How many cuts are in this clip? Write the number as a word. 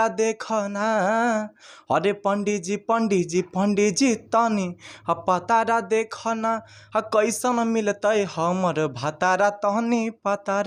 zero